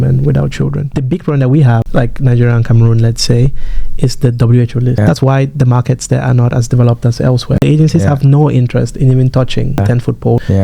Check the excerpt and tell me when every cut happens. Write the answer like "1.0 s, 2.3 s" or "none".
0.9 s, 1.9 s, 5.0 s, 7.6 s, 9.8 s